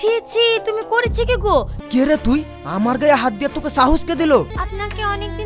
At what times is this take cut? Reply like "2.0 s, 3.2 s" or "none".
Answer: 1.8 s, 4.5 s